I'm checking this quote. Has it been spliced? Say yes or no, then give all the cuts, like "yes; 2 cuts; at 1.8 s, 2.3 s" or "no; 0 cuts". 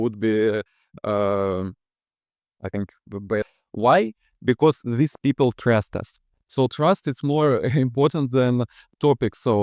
yes; 1 cut; at 3.6 s